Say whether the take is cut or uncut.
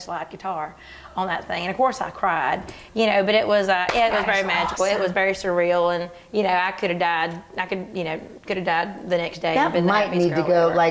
uncut